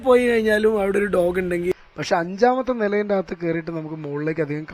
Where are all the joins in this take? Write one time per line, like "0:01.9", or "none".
0:01.6